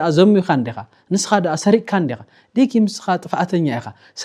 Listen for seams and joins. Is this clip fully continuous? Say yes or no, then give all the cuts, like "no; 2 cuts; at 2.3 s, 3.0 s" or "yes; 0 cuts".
yes; 0 cuts